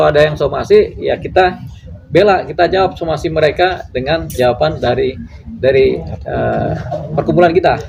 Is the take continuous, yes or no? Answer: yes